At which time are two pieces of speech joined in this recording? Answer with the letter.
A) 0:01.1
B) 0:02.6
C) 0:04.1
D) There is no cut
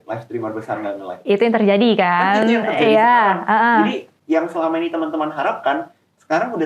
C